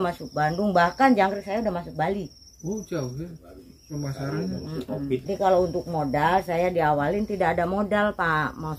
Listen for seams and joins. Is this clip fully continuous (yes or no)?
no